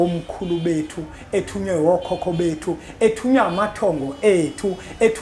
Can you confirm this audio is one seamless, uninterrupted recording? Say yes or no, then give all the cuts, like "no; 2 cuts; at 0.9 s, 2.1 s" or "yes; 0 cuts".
yes; 0 cuts